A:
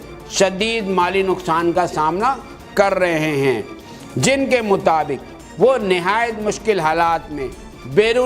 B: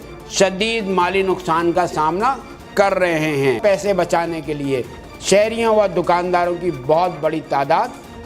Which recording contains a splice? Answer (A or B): B